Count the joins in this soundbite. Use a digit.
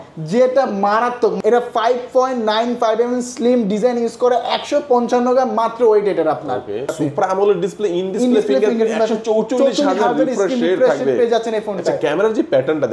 2